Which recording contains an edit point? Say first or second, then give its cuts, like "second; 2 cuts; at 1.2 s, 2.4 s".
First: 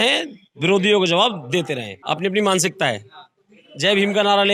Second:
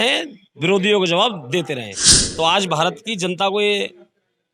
second; 1 cut; at 2.0 s